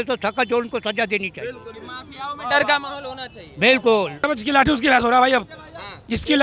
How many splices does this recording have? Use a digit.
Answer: 1